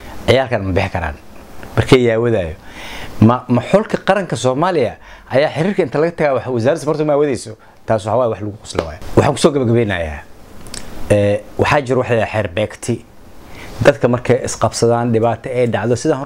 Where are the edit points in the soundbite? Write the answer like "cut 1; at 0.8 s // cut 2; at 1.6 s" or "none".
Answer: none